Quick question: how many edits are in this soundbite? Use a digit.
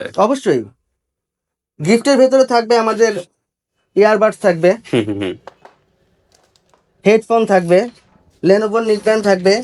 0